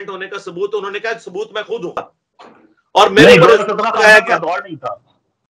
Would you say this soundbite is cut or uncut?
cut